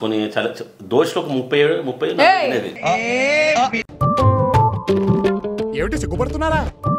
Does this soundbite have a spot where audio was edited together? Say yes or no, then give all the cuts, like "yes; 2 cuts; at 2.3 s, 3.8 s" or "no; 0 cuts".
no; 0 cuts